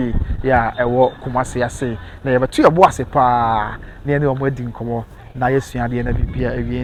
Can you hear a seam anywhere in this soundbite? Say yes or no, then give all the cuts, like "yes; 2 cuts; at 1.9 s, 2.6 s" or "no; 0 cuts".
no; 0 cuts